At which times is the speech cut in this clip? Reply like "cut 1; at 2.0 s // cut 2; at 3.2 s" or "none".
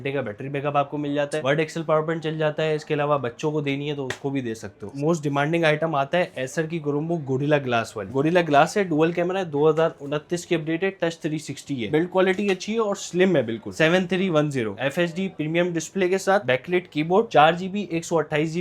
cut 1; at 1.4 s // cut 2; at 4.9 s // cut 3; at 8.0 s // cut 4; at 11.9 s // cut 5; at 13.7 s // cut 6; at 14.7 s